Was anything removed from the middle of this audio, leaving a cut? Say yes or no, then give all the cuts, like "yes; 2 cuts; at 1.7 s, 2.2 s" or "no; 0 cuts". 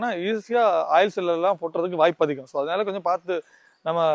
no; 0 cuts